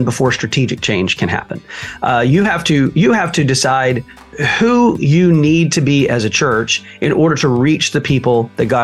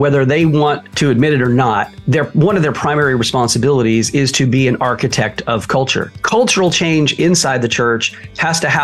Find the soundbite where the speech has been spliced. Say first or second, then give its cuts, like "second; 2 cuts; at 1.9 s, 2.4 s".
second; 3 cuts; at 0.9 s, 1.9 s, 6.1 s